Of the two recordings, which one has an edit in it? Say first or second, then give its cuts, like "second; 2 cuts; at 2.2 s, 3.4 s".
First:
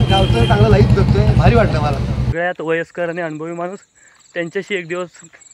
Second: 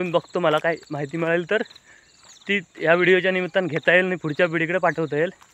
first; 1 cut; at 2.3 s